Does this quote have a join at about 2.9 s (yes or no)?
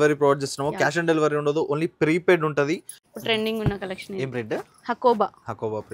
yes